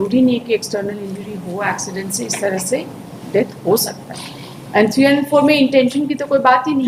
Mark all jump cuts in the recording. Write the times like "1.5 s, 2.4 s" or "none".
none